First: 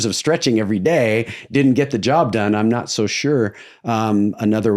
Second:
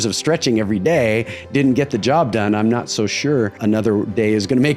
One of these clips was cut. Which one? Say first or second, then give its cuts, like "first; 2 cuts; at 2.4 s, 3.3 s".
second; 1 cut; at 3.6 s